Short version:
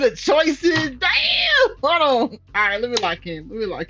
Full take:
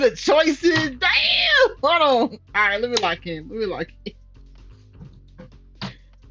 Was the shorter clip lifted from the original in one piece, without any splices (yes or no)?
yes